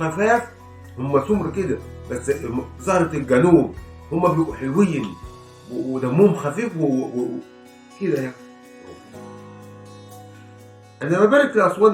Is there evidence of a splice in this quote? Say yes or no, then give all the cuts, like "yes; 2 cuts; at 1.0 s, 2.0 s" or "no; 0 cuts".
no; 0 cuts